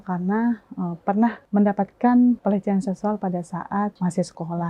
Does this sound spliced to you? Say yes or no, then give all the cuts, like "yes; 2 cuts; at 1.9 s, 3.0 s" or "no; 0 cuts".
yes; 3 cuts; at 1.4 s, 2.4 s, 3.9 s